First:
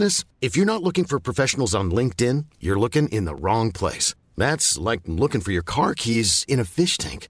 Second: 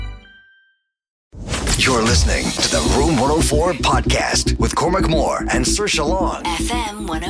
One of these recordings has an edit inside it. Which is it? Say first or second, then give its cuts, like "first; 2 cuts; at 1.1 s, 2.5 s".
second; 1 cut; at 1.4 s